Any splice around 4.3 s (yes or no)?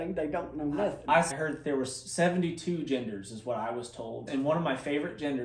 yes